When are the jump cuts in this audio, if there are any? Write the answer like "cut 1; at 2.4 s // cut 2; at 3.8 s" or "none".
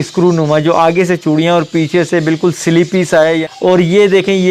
cut 1; at 3.5 s